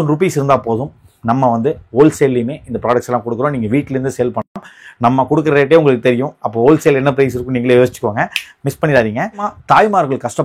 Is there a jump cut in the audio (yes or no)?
no